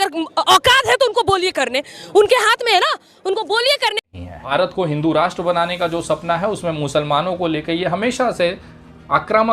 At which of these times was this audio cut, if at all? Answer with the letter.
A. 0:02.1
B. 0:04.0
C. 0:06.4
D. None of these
B